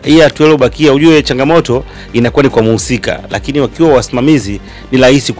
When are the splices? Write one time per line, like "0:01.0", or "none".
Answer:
none